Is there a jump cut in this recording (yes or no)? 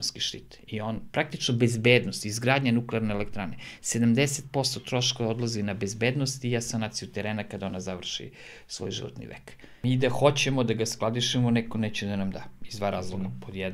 yes